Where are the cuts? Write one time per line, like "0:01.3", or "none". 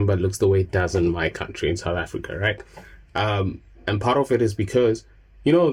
none